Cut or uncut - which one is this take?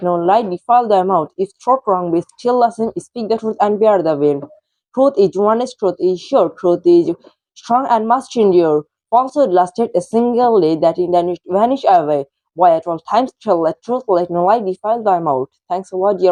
uncut